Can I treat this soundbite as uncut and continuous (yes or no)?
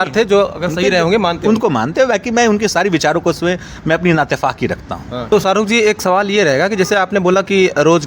no